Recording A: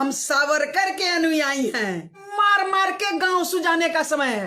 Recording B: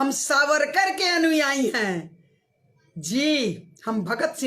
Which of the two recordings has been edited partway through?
A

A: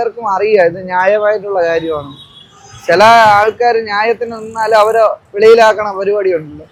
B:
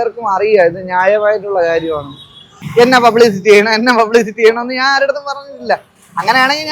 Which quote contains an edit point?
B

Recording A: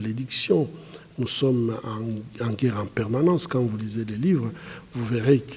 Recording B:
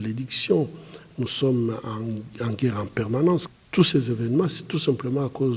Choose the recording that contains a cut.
B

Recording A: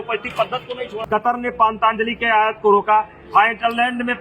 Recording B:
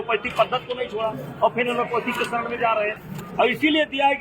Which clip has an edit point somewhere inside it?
A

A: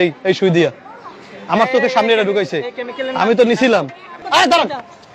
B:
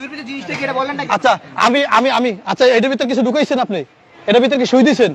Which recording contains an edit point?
A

